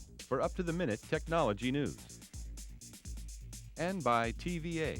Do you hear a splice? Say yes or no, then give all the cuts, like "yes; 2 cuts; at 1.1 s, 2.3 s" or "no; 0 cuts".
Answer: yes; 2 cuts; at 2.0 s, 3.7 s